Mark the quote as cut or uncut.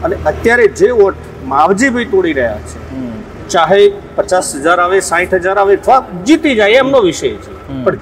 uncut